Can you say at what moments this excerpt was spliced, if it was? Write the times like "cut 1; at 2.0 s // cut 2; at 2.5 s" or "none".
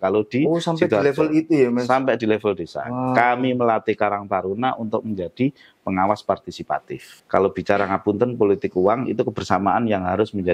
cut 1; at 7.1 s